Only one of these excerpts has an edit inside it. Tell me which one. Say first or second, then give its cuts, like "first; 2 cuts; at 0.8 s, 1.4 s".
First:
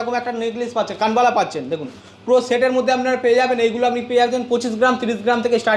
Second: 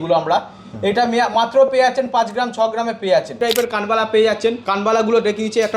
second; 2 cuts; at 3.4 s, 4.7 s